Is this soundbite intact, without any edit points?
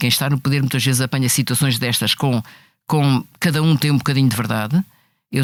yes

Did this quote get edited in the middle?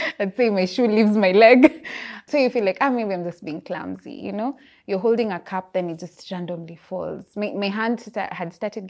yes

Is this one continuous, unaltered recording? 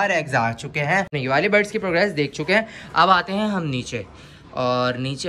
no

